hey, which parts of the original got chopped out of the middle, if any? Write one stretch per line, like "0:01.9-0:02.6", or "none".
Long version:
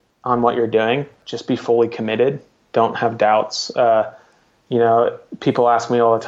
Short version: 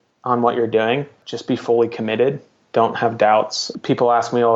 0:03.6-0:05.2